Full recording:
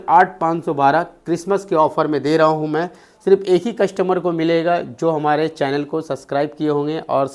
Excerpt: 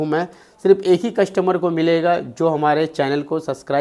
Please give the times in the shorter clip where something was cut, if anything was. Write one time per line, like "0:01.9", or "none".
none